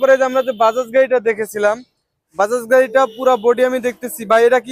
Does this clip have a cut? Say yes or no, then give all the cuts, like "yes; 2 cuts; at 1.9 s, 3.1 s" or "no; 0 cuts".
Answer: no; 0 cuts